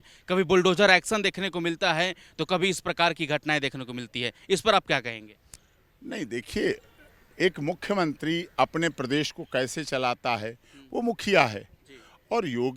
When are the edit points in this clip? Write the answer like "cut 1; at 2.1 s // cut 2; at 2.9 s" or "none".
none